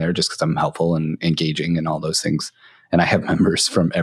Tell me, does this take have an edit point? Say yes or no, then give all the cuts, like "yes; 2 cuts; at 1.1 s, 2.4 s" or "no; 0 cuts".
no; 0 cuts